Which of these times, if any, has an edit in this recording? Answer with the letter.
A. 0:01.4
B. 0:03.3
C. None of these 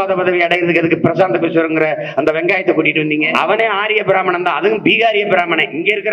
B